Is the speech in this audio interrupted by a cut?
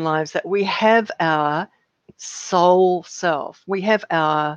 no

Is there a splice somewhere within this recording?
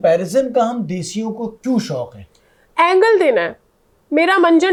no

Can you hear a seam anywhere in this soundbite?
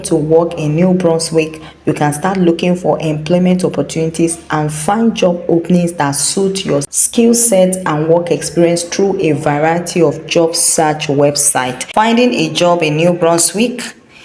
yes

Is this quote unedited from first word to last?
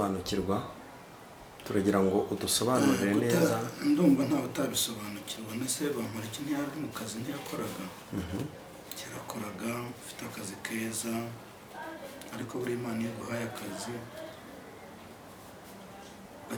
yes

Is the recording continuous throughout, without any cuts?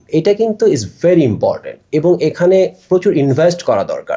yes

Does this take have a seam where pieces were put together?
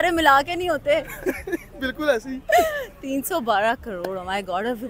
no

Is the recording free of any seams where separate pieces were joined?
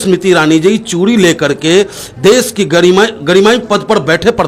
yes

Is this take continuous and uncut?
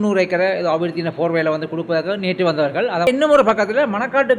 no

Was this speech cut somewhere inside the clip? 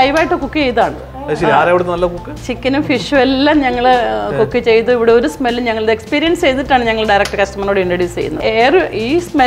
yes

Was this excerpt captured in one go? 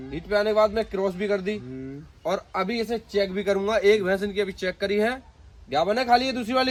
yes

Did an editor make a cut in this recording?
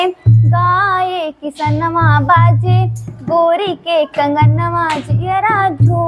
no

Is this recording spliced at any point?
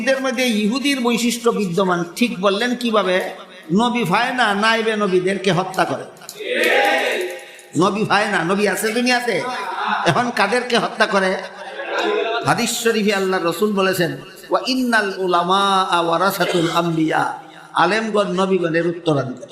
no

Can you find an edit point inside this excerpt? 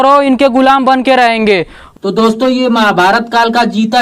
yes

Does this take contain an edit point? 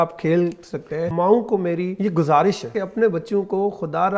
yes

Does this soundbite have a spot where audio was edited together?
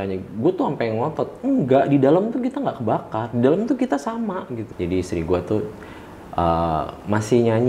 yes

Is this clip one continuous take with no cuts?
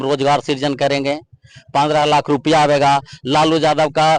yes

